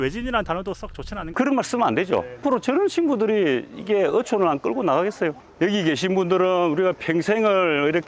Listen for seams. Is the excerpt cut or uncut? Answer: cut